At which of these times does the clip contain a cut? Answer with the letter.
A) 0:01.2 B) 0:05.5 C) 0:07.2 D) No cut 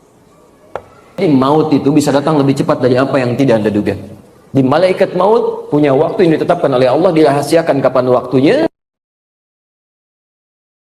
A